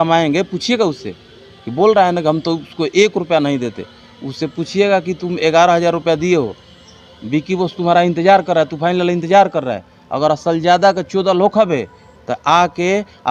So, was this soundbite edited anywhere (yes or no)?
no